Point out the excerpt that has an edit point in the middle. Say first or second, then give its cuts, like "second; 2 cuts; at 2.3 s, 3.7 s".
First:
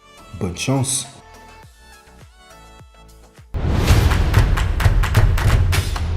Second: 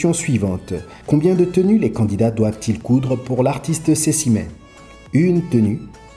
first; 1 cut; at 3.3 s